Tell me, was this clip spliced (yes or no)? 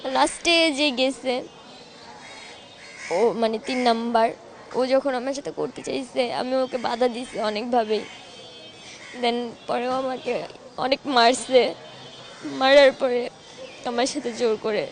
no